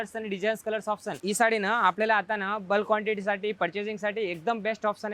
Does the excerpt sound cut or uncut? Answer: cut